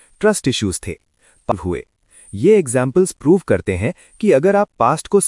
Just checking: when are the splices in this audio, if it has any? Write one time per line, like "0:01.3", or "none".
0:01.5